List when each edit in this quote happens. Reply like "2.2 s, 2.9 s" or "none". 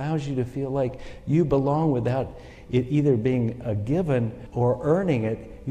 4.4 s